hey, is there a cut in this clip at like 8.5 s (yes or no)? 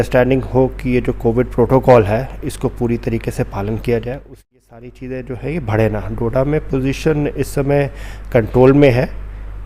no